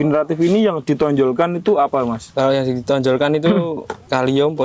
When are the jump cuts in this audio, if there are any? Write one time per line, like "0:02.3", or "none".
none